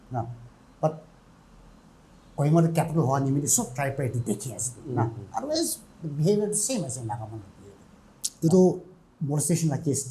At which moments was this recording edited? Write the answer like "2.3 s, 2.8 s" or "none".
8.3 s